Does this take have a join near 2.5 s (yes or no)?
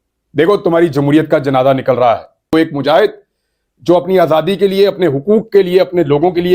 yes